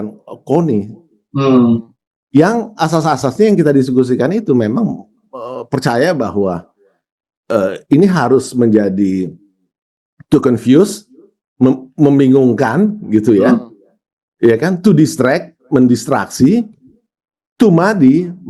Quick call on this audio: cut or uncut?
cut